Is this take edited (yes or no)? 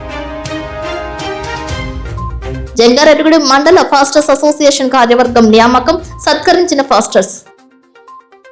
no